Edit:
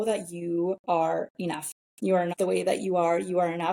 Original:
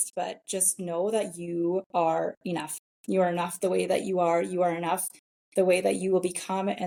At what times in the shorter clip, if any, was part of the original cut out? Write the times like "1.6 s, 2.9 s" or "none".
2.3 s

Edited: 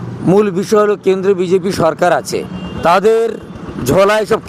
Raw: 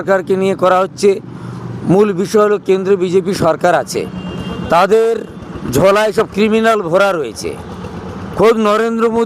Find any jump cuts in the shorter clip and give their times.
2.6 s

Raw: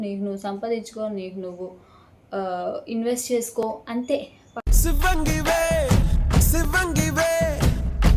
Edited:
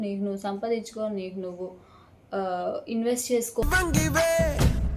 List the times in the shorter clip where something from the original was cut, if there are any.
3.6 s

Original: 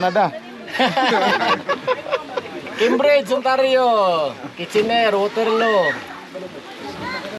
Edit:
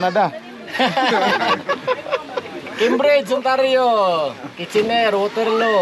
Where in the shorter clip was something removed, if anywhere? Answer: none

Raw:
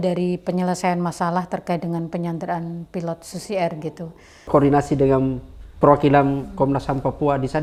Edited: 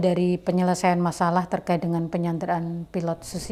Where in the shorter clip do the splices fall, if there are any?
none

